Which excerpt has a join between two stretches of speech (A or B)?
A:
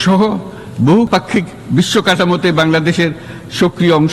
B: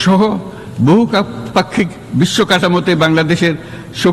A